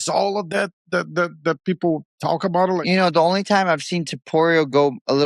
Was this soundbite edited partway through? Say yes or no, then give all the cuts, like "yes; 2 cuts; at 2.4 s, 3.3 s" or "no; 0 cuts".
yes; 1 cut; at 2.8 s